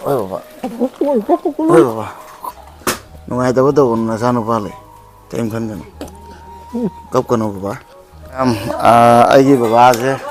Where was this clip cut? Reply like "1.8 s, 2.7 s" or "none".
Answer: 8.4 s